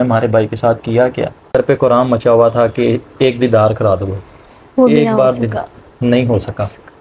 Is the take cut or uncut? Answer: cut